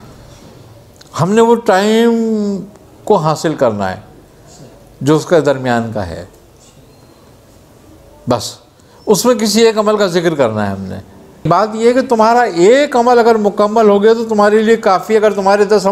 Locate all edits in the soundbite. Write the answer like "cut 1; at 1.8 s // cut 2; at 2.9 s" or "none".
cut 1; at 11.5 s